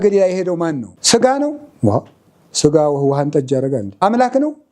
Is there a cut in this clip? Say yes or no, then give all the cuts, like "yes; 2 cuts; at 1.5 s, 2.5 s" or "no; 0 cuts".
yes; 2 cuts; at 0.9 s, 4.0 s